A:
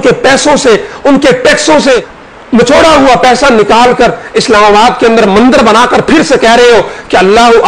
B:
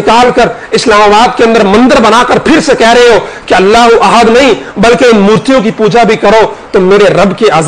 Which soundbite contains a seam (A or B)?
A